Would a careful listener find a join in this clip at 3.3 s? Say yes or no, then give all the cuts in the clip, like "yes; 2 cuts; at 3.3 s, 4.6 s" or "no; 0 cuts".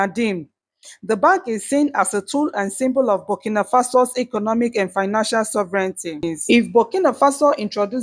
no; 1 cut; at 6.2 s